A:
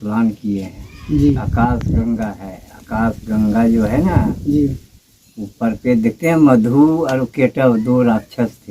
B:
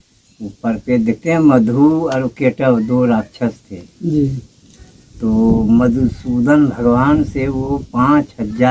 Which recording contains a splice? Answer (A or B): A